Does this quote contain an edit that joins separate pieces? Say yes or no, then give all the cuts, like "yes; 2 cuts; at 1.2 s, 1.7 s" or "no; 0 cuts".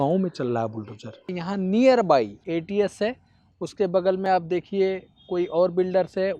yes; 2 cuts; at 1.3 s, 2.4 s